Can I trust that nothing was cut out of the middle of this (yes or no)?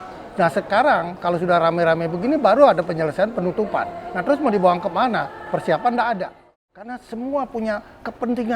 no